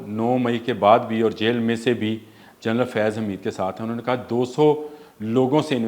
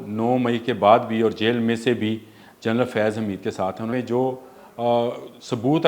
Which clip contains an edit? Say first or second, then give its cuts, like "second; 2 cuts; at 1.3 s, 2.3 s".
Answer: second; 1 cut; at 3.9 s